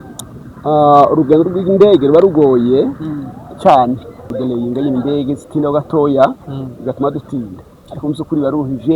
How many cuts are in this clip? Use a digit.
1